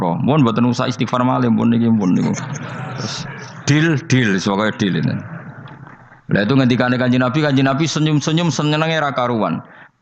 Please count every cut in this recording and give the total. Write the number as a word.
zero